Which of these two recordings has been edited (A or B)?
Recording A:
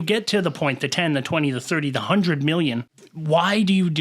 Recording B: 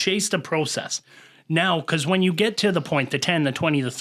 A